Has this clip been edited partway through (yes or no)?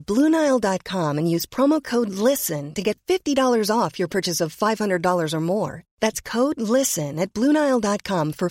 no